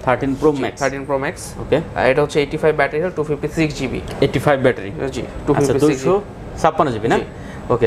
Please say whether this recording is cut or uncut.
uncut